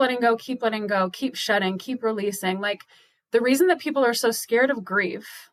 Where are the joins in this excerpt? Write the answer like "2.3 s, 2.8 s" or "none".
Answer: none